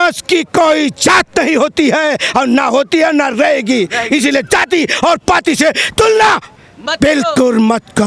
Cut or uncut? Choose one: uncut